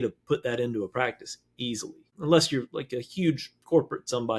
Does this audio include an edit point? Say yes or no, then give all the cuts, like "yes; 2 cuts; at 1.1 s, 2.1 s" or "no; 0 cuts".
yes; 1 cut; at 2.0 s